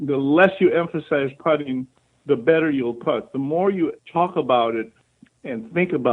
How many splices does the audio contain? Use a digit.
1